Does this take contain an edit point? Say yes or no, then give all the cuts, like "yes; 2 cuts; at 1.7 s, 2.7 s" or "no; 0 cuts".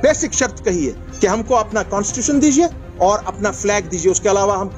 yes; 2 cuts; at 1.0 s, 2.8 s